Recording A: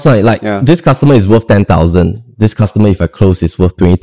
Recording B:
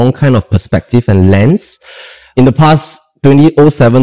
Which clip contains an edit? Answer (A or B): B